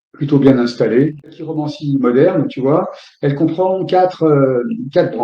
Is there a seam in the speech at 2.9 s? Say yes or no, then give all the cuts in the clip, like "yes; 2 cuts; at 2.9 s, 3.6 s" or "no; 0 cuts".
no; 1 cut; at 1.5 s